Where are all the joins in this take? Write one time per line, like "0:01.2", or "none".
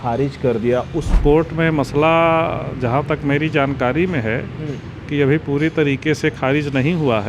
0:01.2